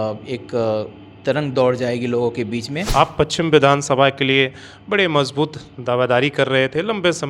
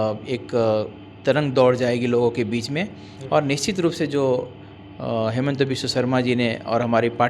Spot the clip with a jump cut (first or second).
first